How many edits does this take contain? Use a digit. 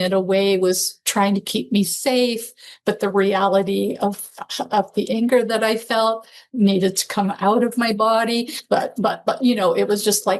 0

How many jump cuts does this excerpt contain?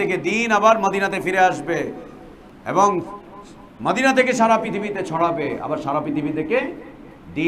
0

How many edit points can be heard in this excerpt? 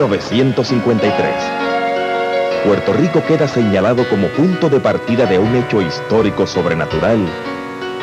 1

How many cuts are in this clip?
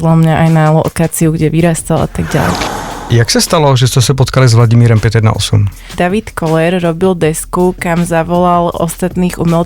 2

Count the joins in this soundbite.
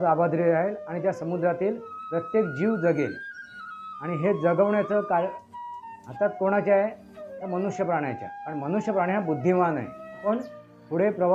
1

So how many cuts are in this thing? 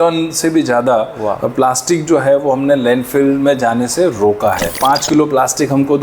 1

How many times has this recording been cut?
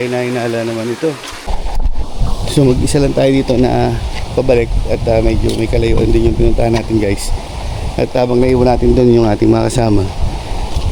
1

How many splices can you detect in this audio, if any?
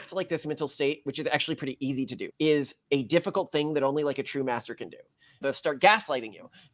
2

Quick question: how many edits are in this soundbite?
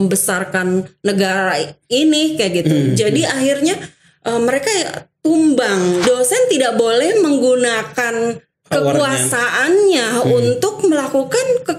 1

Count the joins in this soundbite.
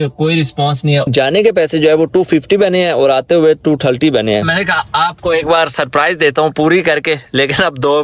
2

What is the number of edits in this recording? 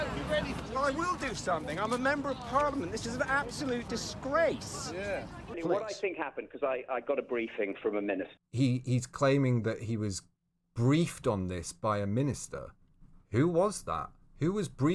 2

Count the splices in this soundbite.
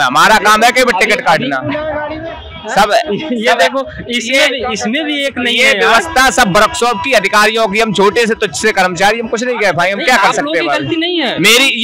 0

